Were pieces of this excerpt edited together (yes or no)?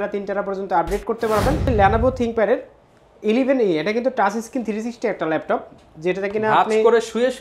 yes